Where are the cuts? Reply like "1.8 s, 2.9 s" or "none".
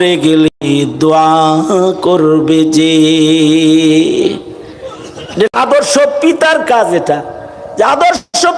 none